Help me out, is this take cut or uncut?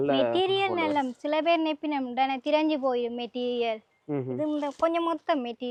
uncut